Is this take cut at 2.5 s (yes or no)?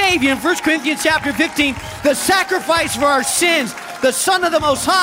no